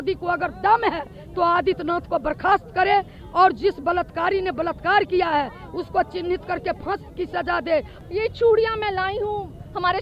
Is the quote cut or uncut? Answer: cut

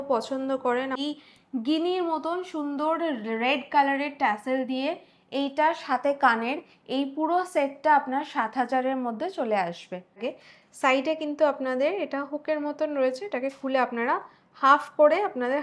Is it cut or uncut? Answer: cut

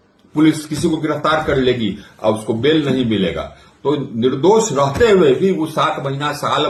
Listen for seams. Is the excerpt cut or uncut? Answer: uncut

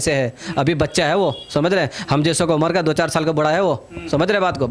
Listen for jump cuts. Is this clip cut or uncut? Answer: uncut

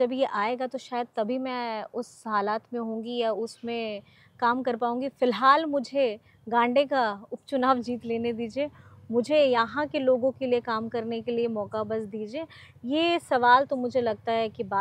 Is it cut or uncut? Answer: uncut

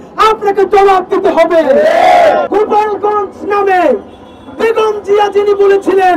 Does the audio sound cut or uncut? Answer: cut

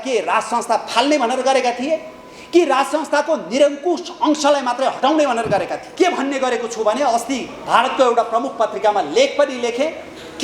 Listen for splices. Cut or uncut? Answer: cut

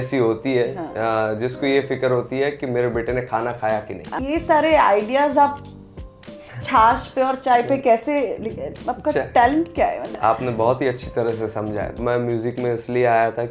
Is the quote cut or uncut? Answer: cut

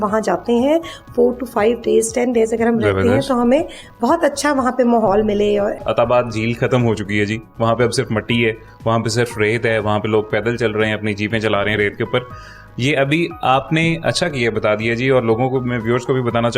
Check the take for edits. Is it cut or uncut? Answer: cut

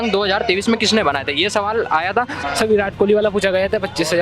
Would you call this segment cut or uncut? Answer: cut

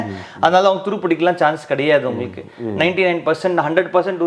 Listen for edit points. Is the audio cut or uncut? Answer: uncut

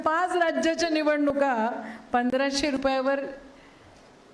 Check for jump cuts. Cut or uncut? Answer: uncut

